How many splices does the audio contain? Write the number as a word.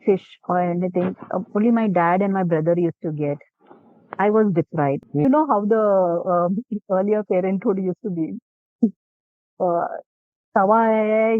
one